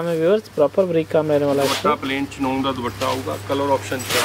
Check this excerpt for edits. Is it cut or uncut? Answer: uncut